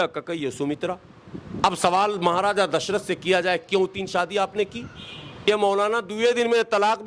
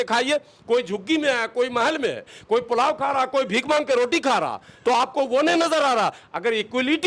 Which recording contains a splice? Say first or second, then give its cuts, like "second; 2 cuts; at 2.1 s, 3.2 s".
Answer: first; 1 cut; at 5.4 s